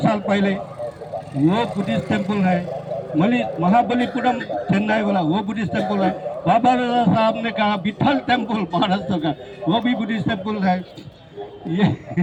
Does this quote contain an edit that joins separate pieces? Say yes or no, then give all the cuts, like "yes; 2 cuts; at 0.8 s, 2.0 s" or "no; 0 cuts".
no; 0 cuts